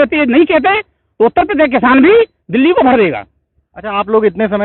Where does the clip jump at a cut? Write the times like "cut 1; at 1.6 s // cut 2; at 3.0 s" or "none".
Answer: none